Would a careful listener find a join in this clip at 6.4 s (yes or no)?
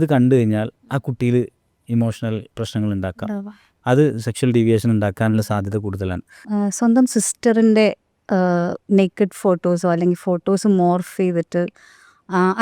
yes